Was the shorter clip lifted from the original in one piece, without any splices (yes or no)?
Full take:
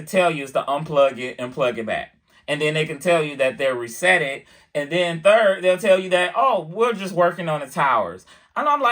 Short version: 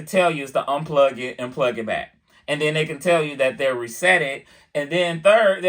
yes